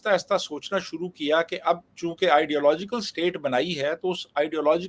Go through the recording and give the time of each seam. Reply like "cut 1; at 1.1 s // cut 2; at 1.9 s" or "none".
none